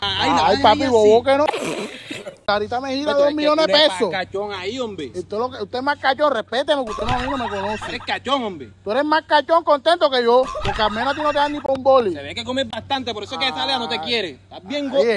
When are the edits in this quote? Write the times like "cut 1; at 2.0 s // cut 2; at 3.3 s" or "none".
none